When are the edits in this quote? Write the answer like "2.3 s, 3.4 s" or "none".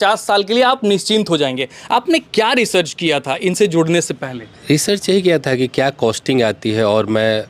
none